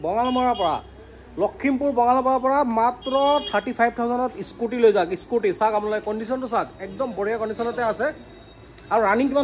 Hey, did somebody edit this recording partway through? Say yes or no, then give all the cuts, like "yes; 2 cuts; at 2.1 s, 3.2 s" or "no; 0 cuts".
no; 0 cuts